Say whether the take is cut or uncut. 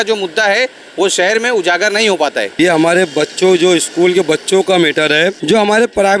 cut